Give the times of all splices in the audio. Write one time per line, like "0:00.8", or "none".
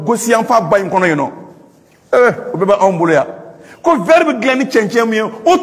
none